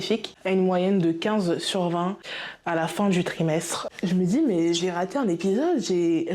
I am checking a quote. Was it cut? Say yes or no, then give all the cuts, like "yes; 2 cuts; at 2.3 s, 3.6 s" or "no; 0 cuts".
yes; 1 cut; at 3.9 s